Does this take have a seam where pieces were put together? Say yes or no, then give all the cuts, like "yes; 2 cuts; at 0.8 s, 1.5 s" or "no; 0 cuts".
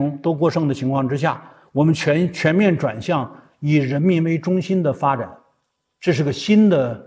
no; 0 cuts